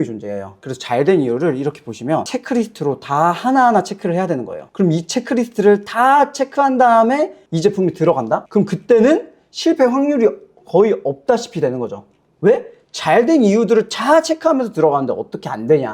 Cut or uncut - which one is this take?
uncut